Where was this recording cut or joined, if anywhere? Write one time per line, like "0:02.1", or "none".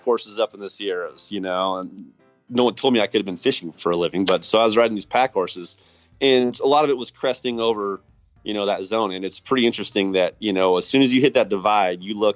0:03.7